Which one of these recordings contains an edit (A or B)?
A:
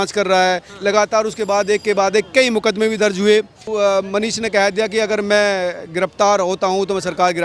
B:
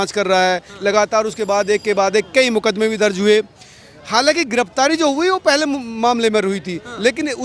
A